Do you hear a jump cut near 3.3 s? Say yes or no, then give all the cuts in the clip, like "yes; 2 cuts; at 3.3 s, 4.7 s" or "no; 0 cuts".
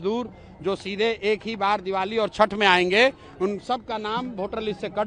no; 0 cuts